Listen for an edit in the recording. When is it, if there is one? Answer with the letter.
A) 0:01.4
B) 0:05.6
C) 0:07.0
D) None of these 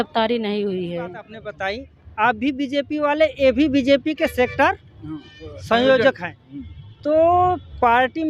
A